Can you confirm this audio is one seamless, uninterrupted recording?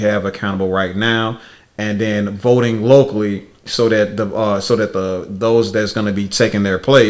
yes; 0 cuts

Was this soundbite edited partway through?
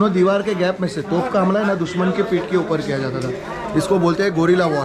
no; 0 cuts

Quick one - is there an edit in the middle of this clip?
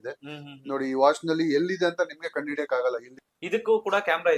yes; 1 cut; at 3.3 s

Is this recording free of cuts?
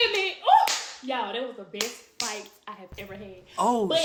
yes; 0 cuts

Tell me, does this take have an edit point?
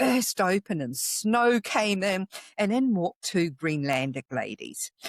no; 0 cuts

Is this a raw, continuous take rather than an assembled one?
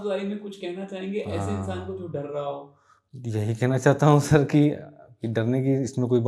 yes; 0 cuts

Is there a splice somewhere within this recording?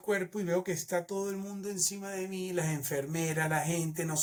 no; 0 cuts

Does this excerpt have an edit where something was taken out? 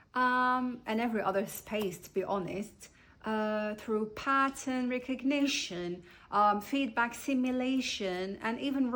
no; 0 cuts

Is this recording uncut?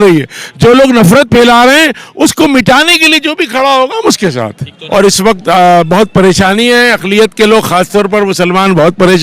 no; 1 cut; at 4.7 s

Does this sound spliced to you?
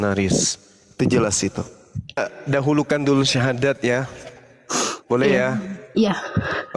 yes; 1 cut; at 2.2 s

